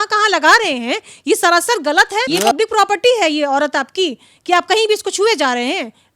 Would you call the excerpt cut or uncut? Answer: cut